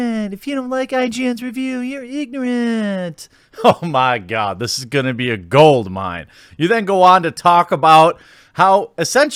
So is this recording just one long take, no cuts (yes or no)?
yes